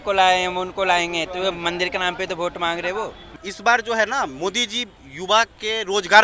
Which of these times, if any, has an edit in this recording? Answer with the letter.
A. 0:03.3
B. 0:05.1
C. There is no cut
A